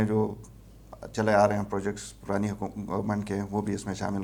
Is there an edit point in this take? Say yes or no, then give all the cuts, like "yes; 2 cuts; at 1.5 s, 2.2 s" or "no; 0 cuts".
no; 0 cuts